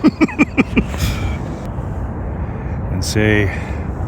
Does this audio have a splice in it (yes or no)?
yes